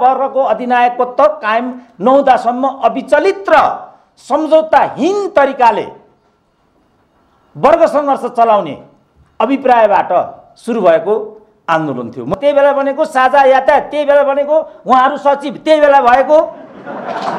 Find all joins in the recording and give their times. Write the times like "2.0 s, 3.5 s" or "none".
12.3 s